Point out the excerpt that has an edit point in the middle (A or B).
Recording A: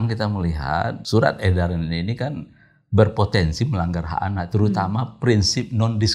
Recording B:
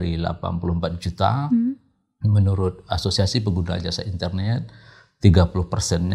A